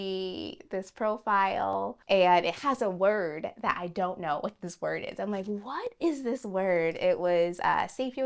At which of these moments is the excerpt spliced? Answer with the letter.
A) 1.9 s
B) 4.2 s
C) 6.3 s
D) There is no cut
A